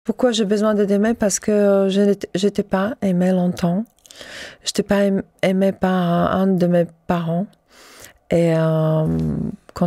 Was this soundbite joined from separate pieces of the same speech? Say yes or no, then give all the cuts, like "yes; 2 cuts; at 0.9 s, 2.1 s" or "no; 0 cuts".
no; 0 cuts